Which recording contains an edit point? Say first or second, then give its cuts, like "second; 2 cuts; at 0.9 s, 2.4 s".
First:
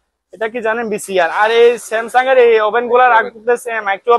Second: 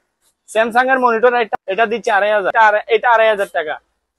second; 2 cuts; at 1.5 s, 2.5 s